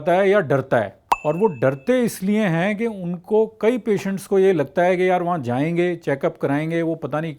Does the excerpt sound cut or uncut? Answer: cut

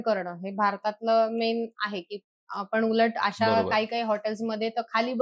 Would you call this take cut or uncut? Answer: uncut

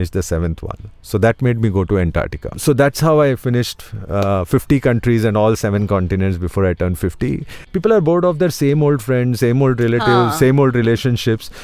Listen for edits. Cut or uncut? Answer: cut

